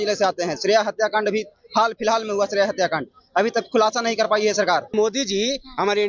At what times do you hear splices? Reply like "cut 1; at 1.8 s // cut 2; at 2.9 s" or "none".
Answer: cut 1; at 4.9 s